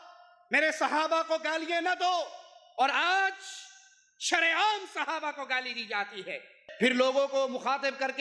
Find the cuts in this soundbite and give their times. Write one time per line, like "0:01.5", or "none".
0:06.6